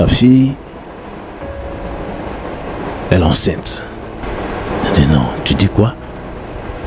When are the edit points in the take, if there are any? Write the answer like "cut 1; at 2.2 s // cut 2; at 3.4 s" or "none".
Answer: cut 1; at 4.3 s